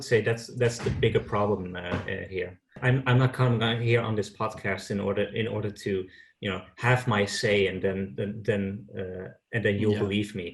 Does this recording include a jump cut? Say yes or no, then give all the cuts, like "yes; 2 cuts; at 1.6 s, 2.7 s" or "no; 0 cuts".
yes; 1 cut; at 2.7 s